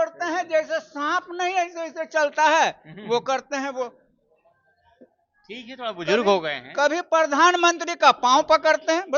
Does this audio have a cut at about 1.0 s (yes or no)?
no